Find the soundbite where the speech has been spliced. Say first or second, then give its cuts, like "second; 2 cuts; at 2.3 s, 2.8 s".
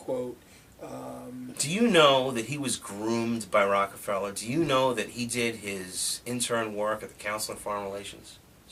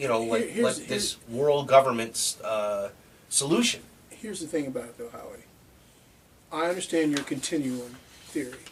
first; 1 cut; at 2.9 s